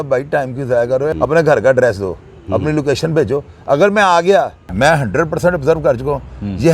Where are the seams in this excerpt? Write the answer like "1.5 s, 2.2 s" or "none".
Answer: 1.1 s, 4.6 s